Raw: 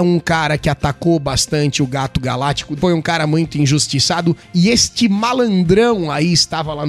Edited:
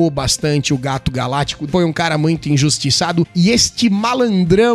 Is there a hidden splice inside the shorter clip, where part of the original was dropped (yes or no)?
yes